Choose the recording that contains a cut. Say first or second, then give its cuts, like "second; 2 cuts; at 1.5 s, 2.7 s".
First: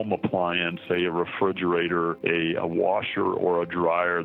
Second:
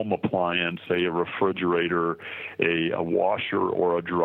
first; 1 cut; at 2.2 s